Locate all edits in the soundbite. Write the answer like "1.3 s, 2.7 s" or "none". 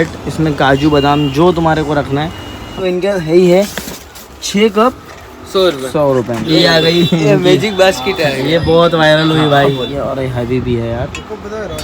2.8 s, 6.4 s, 9.9 s